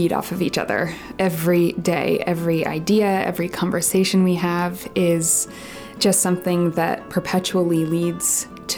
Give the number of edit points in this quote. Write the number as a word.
zero